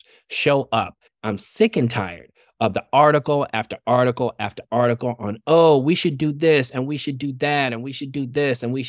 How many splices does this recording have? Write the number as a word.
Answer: one